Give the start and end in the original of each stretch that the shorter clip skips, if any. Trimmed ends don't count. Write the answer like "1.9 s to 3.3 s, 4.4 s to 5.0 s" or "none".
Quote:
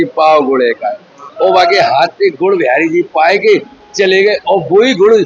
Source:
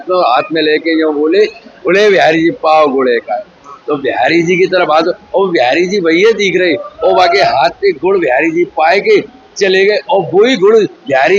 3.7 s to 6.9 s